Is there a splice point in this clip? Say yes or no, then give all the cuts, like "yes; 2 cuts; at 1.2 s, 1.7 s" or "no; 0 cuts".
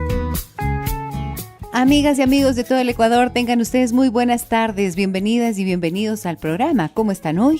yes; 1 cut; at 1.1 s